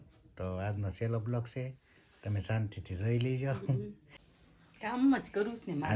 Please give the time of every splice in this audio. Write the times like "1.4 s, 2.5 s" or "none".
4.3 s